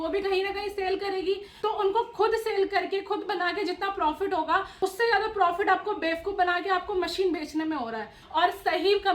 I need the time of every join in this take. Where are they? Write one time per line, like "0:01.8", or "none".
0:01.5
0:04.7
0:08.2